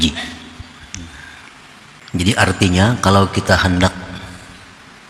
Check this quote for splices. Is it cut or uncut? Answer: cut